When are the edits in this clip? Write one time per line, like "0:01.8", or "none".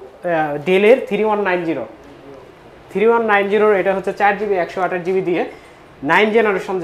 none